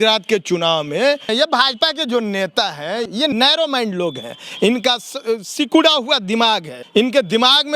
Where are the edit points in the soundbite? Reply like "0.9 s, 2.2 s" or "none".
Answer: 1.3 s, 3.2 s, 6.7 s